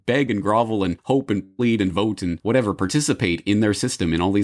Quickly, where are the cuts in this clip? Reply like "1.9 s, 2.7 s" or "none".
1.0 s

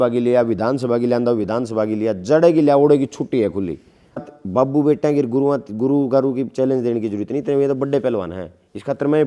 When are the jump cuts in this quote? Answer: 4.2 s

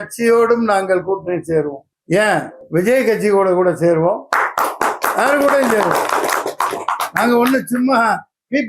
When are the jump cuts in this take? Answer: 1.8 s, 2.6 s

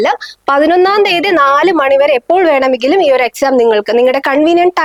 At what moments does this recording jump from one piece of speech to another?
none

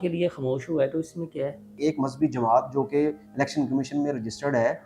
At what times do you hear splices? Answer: 1.8 s

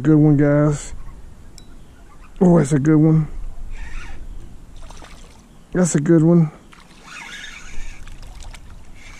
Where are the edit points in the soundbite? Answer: none

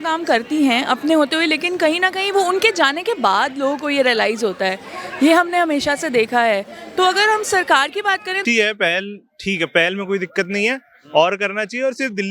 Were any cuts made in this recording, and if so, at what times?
8.4 s

